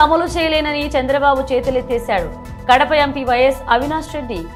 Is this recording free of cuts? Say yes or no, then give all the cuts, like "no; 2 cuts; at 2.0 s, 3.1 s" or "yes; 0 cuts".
yes; 0 cuts